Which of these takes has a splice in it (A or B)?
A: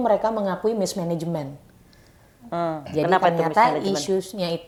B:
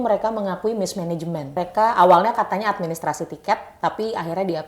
B